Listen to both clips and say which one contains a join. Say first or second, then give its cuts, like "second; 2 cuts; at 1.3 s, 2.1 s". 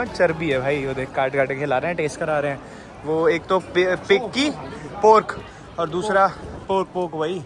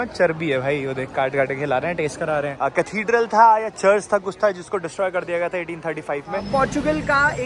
second; 2 cuts; at 2.5 s, 6.4 s